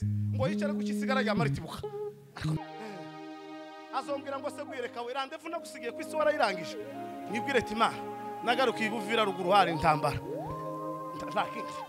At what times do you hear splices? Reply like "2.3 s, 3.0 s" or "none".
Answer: 2.6 s